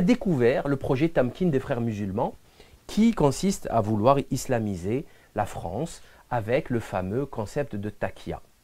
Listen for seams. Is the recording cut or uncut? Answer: cut